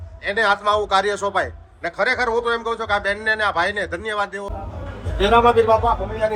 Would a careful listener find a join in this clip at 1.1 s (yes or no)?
no